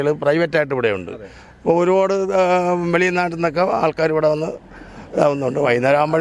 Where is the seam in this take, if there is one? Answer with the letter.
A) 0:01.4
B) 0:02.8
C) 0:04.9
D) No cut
D